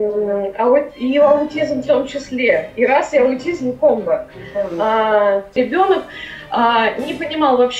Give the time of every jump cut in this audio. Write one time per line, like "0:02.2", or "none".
0:05.6